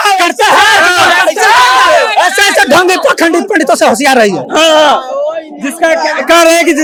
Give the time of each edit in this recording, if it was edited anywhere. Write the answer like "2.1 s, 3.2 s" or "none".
none